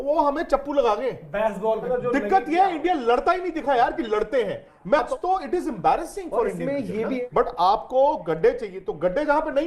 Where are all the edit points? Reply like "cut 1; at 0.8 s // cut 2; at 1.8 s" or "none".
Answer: cut 1; at 1.9 s // cut 2; at 5.1 s // cut 3; at 7.2 s

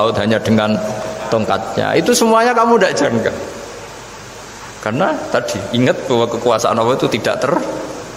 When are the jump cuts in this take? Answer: none

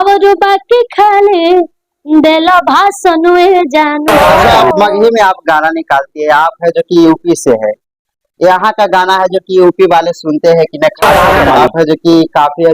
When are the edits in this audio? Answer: cut 1; at 4.4 s // cut 2; at 11.5 s

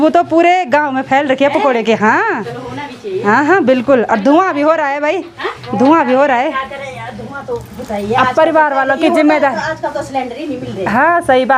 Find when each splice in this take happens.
none

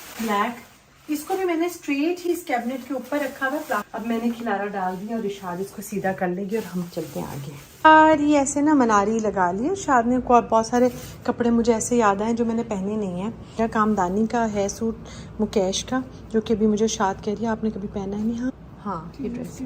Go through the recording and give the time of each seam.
cut 1; at 3.9 s // cut 2; at 7.9 s // cut 3; at 13.6 s // cut 4; at 18.5 s

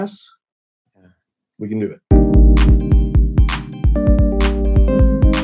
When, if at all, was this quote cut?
cut 1; at 2.0 s

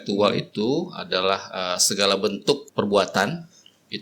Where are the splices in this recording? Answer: cut 1; at 2.7 s

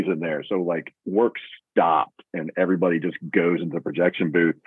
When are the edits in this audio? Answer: none

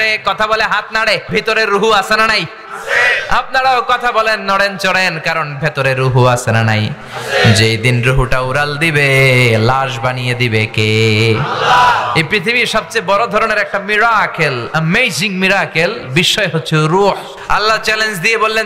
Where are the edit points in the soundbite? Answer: cut 1; at 1.2 s // cut 2; at 17.3 s

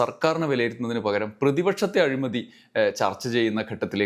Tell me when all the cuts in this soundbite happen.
none

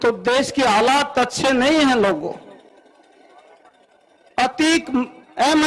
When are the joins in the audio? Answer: none

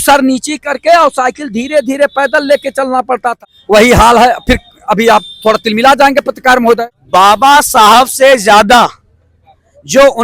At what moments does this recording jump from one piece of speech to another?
cut 1; at 3.4 s // cut 2; at 6.9 s

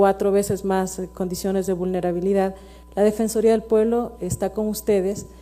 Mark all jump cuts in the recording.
none

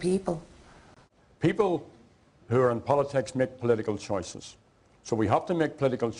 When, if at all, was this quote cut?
none

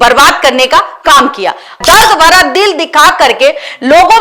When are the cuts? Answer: cut 1; at 1.8 s

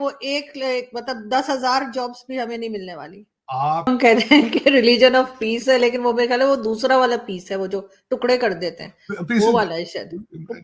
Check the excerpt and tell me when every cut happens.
cut 1; at 3.9 s

